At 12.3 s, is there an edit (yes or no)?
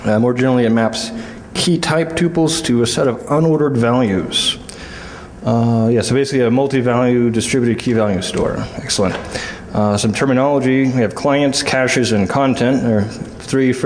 no